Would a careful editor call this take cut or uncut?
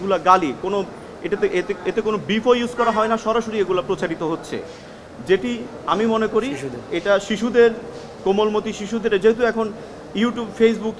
uncut